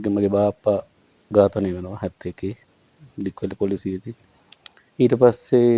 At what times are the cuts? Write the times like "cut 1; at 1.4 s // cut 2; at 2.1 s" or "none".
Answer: none